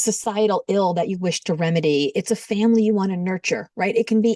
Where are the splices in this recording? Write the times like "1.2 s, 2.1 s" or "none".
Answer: none